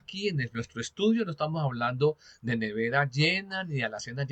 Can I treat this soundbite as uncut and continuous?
yes; 0 cuts

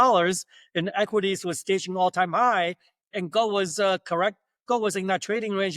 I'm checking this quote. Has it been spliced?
no; 0 cuts

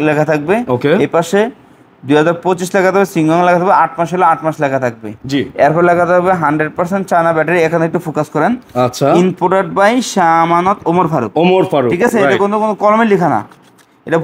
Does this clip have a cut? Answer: no; 0 cuts

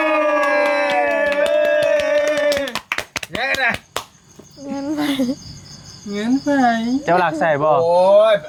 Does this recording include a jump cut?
no; 0 cuts

